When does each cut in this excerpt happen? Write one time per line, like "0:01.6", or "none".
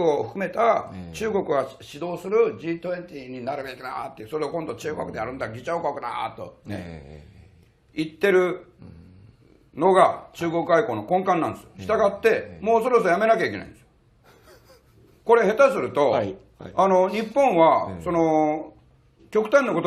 0:01.9